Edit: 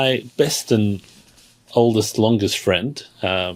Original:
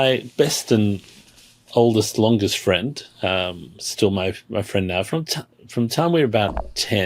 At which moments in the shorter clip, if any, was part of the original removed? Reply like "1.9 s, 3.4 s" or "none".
none